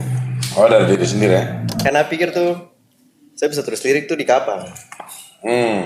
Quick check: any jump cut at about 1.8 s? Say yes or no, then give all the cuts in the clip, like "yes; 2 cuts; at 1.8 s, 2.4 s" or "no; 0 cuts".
yes; 1 cut; at 1.8 s